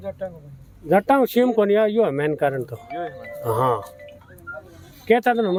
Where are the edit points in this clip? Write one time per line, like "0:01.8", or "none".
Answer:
none

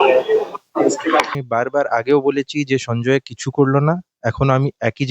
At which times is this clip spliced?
0:01.4

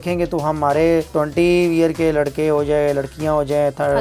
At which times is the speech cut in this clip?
0:01.1

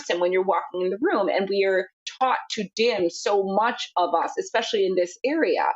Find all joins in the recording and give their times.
0:02.0

